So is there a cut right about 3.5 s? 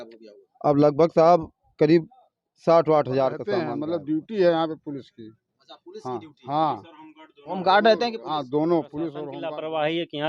yes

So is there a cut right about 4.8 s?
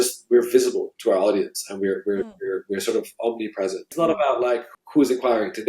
yes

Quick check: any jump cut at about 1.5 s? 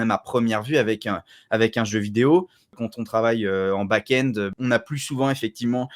no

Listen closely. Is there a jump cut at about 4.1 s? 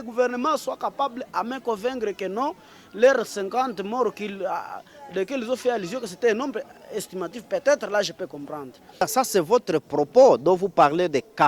no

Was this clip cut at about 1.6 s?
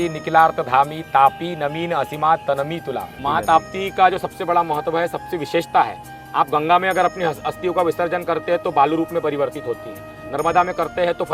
no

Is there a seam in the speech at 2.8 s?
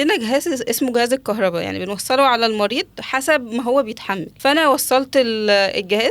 no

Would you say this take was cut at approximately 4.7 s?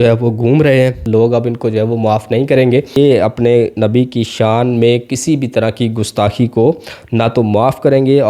no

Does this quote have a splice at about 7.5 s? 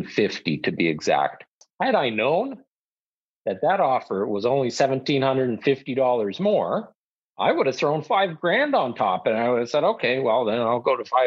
no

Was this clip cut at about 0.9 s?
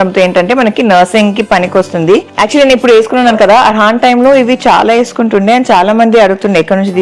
no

